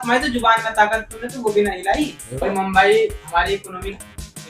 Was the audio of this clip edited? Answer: no; 0 cuts

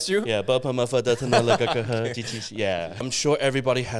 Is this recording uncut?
no; 1 cut; at 3.0 s

